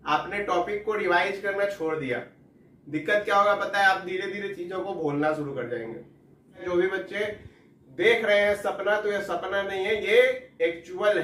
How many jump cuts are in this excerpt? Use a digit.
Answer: 1